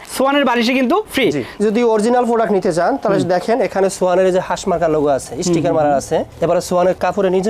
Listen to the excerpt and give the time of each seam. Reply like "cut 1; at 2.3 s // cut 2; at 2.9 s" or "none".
cut 1; at 1.5 s